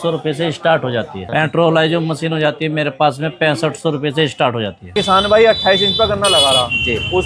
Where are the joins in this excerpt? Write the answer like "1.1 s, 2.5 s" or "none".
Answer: 1.2 s, 4.9 s